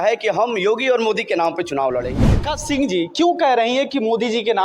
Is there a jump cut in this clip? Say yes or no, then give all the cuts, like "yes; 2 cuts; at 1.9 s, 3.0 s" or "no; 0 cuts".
yes; 1 cut; at 2.5 s